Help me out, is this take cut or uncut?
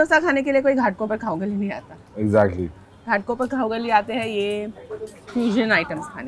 uncut